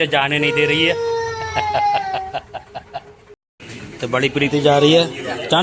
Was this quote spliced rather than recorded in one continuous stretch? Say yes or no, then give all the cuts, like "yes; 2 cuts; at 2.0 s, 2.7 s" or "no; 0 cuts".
yes; 1 cut; at 3.4 s